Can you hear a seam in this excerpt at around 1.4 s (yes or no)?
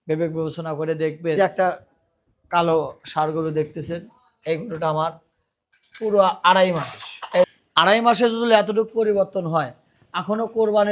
yes